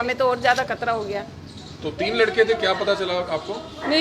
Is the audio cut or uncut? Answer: uncut